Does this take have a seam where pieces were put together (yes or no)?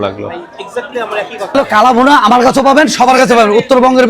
yes